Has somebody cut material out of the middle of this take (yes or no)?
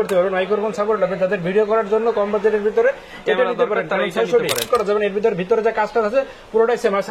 yes